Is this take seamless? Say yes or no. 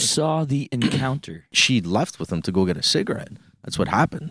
no